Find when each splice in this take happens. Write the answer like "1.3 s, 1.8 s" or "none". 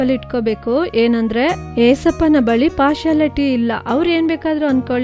1.6 s